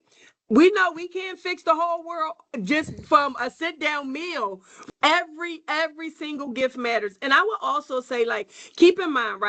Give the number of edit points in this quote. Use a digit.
1